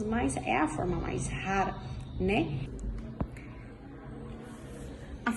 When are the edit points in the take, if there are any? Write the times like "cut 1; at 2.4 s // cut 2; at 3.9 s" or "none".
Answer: cut 1; at 2.7 s